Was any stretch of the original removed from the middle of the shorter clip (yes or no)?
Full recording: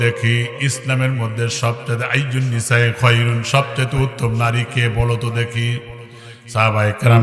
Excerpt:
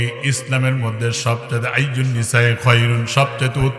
no